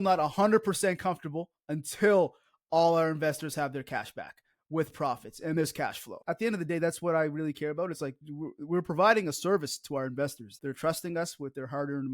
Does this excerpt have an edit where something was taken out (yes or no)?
yes